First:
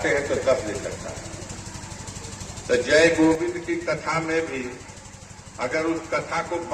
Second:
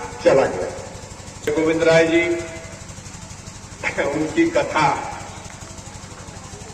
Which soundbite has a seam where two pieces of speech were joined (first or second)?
second